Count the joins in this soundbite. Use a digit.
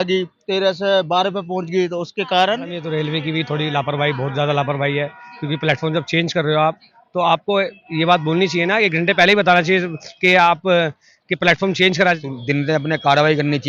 2